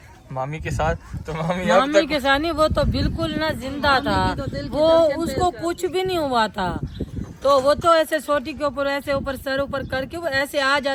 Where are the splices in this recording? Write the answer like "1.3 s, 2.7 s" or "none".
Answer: none